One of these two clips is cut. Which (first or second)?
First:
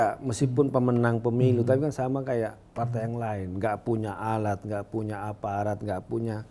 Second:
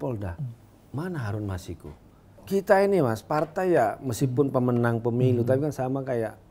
second